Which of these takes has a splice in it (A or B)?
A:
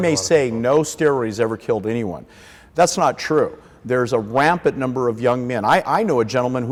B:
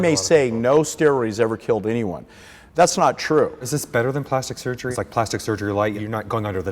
B